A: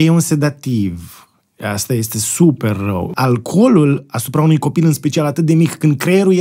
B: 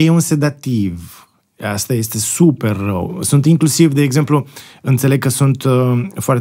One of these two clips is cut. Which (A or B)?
A